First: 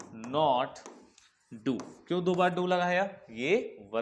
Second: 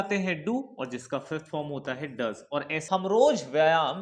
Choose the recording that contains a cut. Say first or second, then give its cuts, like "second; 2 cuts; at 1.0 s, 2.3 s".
second; 1 cut; at 2.8 s